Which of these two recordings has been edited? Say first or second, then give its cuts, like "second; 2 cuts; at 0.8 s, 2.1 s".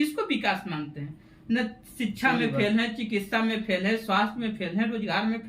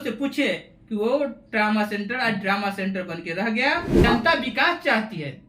second; 1 cut; at 4.0 s